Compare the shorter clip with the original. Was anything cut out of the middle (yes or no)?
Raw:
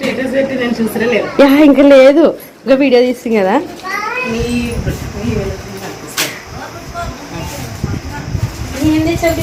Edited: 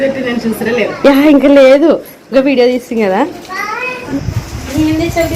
yes